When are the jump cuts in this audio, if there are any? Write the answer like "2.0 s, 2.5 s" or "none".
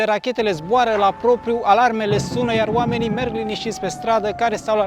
none